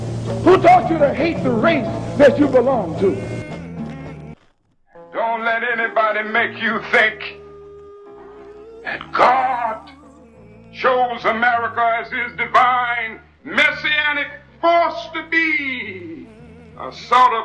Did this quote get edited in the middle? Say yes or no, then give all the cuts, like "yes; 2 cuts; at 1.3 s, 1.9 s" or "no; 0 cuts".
yes; 1 cut; at 4.3 s